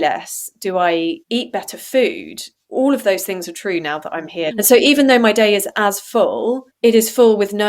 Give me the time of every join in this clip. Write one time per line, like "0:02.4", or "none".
0:04.5

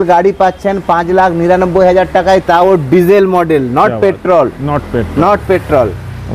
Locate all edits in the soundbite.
none

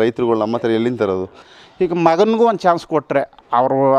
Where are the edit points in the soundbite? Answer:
0:01.4

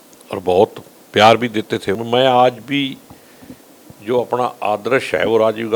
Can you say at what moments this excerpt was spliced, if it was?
0:02.0

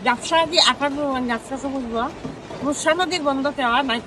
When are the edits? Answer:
none

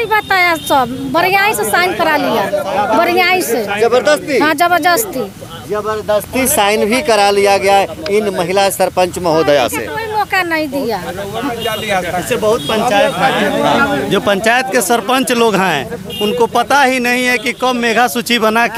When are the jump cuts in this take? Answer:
none

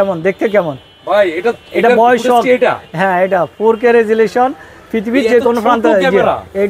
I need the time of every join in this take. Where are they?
none

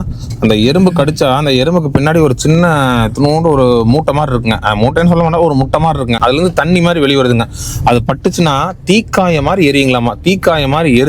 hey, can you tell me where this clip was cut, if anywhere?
0:06.2

